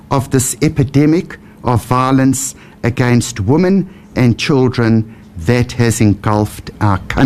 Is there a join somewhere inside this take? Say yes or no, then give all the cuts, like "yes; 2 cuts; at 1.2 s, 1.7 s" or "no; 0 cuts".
no; 0 cuts